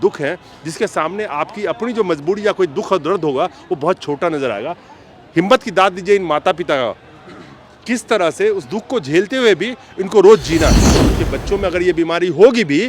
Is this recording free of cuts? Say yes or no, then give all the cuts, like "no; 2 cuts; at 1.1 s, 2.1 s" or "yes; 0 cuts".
no; 1 cut; at 11.0 s